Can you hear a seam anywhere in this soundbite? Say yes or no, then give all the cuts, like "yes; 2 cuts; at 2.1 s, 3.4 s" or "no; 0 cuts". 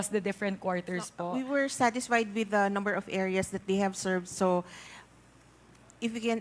yes; 1 cut; at 1.2 s